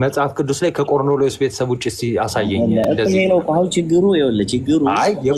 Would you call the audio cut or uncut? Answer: uncut